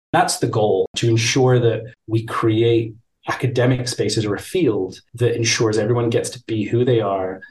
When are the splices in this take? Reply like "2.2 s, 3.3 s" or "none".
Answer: 0.9 s, 1.9 s

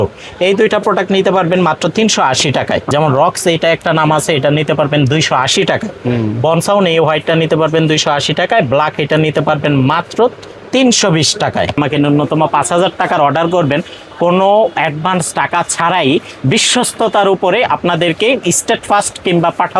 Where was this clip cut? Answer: 2.9 s, 11.8 s

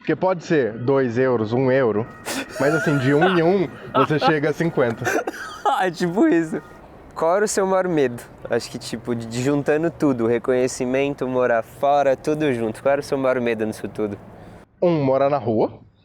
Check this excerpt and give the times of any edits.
6.6 s

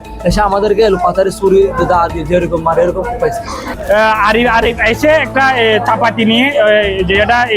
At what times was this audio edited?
3.7 s

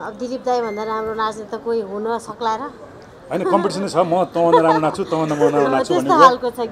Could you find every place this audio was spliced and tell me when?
none

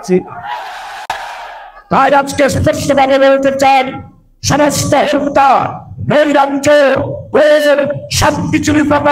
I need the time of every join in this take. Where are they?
1.7 s

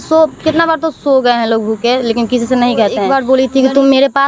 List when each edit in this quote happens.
3.1 s

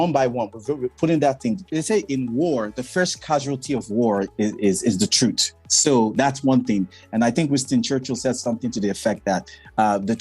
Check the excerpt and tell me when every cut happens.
1.7 s, 4.3 s

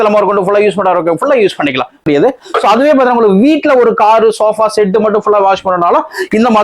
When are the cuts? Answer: 2.0 s

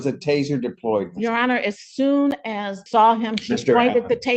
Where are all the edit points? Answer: 2.8 s

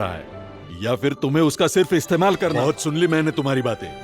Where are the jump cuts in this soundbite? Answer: 2.5 s

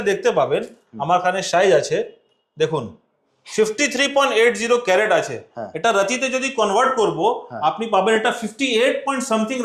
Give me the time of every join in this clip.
none

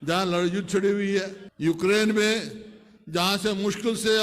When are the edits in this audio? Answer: 1.4 s

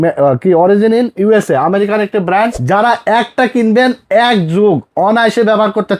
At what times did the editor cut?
2.6 s

